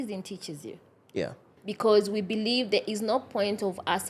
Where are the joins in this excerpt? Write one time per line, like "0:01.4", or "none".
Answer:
0:01.5